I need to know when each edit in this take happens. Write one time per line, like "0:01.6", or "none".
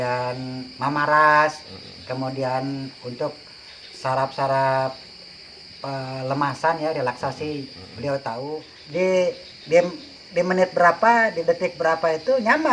0:08.7